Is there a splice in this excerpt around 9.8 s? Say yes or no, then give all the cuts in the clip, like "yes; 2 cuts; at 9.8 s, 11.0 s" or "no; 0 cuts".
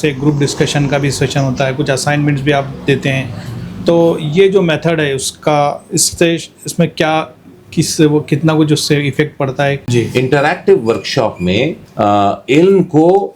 yes; 2 cuts; at 9.8 s, 11.8 s